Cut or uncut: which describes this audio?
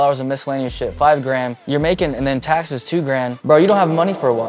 cut